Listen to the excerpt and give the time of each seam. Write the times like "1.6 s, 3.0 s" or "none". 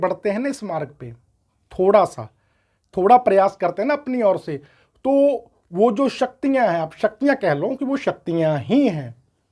none